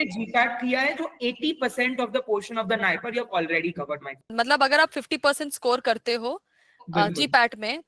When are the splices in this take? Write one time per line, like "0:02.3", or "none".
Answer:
0:04.2